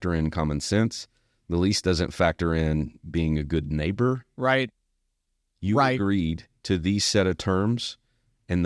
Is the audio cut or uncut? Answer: uncut